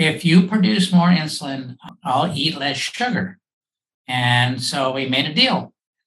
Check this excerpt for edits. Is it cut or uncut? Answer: uncut